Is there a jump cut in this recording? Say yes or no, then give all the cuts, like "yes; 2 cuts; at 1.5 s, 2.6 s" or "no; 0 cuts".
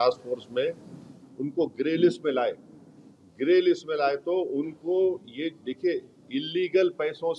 no; 0 cuts